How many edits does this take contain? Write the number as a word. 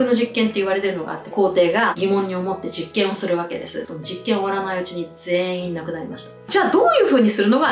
three